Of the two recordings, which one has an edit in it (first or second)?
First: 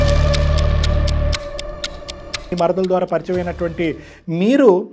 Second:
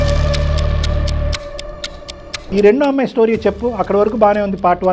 second